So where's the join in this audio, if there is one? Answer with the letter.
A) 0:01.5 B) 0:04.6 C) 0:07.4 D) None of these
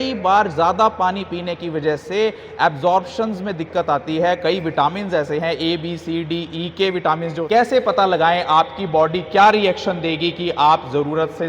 C